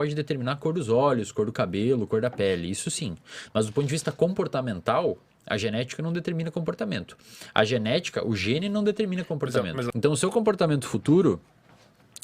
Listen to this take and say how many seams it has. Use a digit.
1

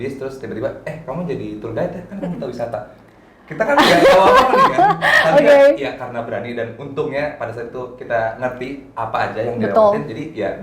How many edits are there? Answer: 0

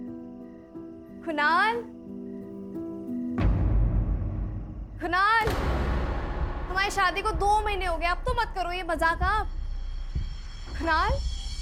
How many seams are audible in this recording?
0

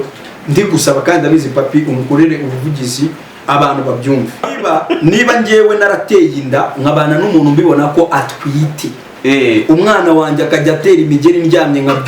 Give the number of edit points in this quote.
1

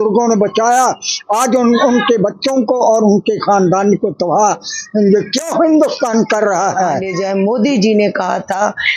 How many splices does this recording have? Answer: 1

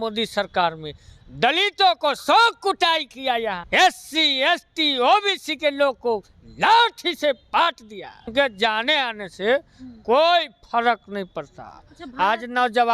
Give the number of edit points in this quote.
2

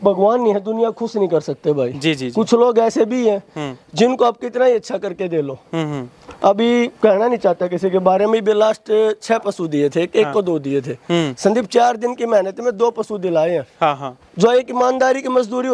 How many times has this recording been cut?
0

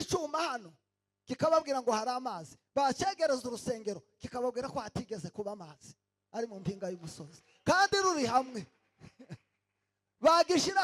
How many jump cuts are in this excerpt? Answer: 0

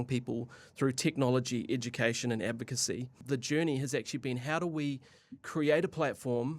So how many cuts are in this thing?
1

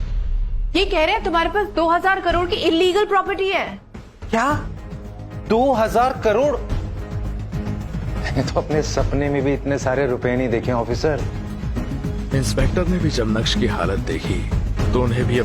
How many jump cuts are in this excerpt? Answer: 2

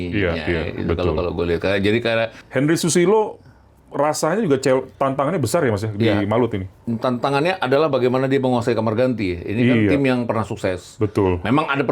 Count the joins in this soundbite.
1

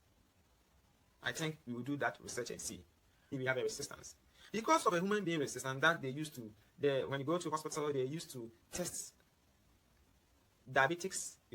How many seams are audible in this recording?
1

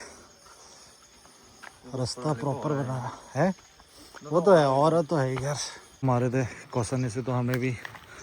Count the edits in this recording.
1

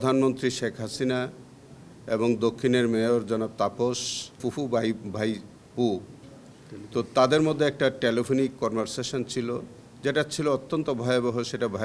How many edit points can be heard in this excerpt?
1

